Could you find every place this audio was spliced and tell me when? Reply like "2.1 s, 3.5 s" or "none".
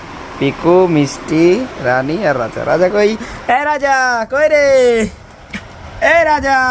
none